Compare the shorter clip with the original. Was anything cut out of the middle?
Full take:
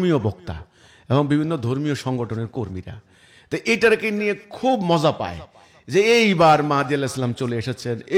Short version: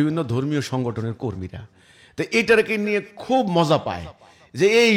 no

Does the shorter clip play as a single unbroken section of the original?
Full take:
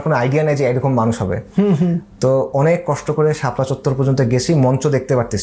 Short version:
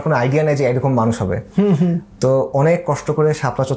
yes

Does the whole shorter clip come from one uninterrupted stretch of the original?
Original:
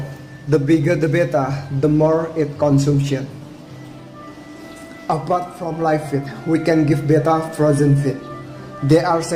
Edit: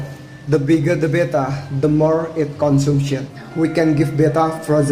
no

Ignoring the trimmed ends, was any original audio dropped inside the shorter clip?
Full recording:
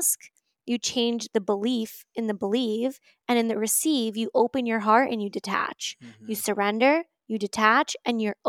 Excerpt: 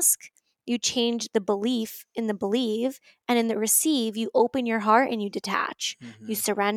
no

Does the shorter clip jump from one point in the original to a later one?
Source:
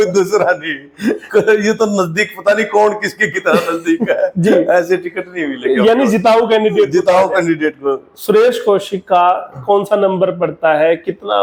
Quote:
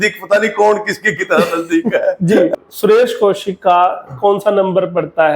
yes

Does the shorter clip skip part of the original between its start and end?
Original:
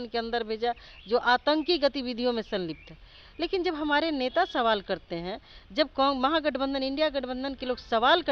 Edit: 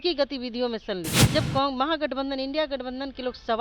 yes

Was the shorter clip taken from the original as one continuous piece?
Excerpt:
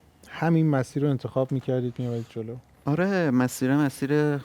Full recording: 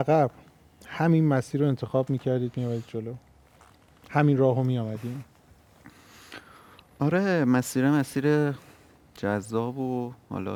no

